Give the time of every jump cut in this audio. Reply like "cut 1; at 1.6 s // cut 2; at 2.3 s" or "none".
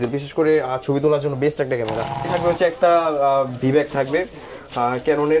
cut 1; at 2.3 s